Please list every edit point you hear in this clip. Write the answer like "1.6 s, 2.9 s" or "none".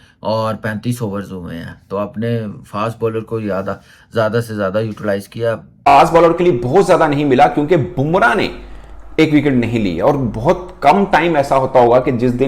5.9 s